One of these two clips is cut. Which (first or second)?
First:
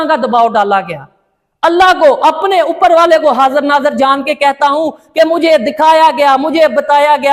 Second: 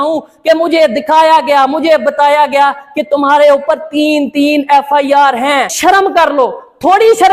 second